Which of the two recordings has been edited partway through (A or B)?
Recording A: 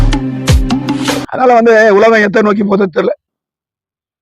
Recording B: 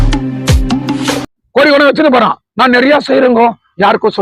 B